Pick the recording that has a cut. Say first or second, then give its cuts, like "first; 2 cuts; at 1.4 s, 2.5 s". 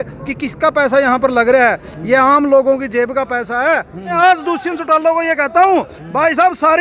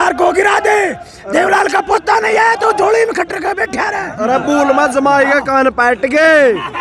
first; 1 cut; at 4.2 s